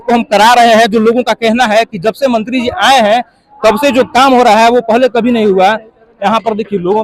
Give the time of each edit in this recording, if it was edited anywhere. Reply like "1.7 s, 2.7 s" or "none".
none